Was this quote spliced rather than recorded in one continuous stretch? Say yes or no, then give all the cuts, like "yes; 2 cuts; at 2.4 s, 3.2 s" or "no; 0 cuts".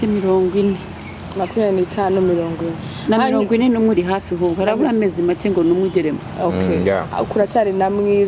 no; 0 cuts